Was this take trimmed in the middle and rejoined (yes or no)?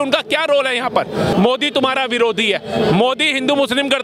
yes